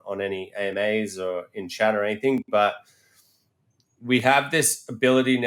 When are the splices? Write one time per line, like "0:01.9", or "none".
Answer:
none